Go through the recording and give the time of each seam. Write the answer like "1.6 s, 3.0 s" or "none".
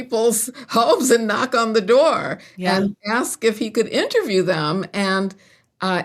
none